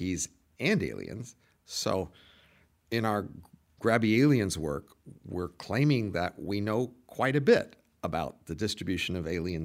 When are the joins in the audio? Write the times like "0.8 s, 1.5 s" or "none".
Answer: none